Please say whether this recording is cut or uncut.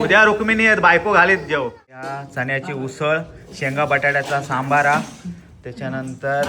cut